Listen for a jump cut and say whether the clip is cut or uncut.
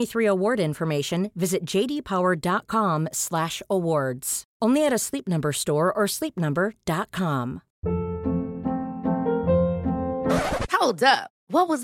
cut